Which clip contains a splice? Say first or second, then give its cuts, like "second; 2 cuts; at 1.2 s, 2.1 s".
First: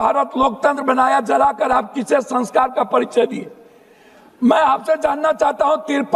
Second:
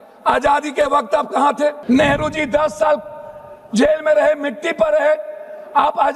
second; 1 cut; at 1.8 s